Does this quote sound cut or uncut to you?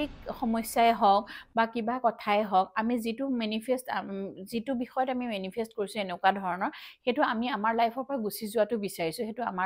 uncut